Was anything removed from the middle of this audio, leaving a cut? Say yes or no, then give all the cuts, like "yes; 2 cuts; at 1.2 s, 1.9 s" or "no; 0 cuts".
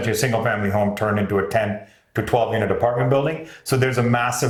no; 0 cuts